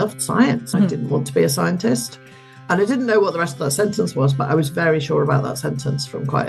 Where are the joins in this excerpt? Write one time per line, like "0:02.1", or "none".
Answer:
none